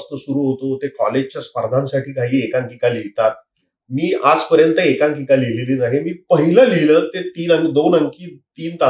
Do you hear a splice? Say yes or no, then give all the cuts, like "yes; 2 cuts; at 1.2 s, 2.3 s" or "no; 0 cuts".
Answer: no; 0 cuts